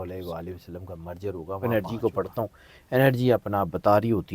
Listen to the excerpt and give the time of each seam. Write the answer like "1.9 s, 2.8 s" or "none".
1.7 s